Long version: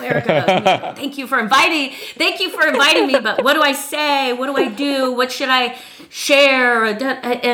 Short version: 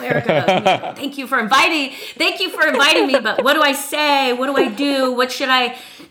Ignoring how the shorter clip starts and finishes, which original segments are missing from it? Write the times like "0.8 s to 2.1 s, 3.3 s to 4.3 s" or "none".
none

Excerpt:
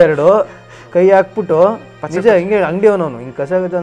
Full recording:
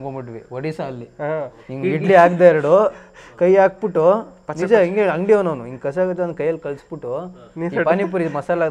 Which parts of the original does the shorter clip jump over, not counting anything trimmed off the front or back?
none

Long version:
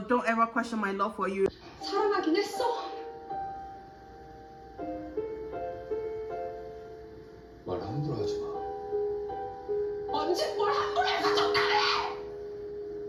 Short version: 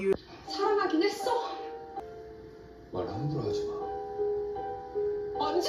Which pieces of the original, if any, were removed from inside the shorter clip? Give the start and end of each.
3.3 s to 6.7 s

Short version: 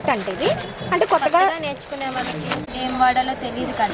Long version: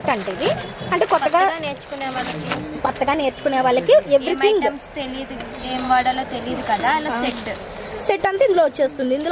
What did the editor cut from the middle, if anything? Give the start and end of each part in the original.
2.6 s to 5.5 s

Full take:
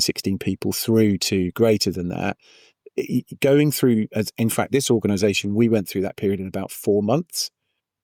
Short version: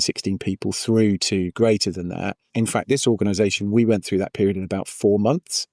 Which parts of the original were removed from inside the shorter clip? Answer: 2.5 s to 4.3 s

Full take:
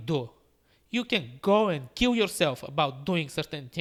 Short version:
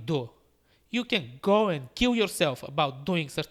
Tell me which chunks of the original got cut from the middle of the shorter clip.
none

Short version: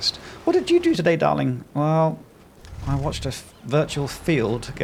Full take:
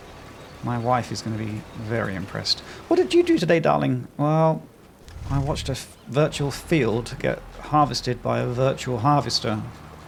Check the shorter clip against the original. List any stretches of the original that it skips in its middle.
none

